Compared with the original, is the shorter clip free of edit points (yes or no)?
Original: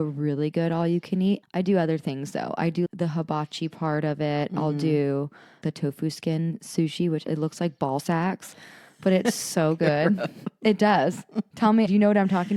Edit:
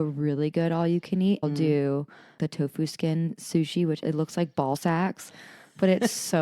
no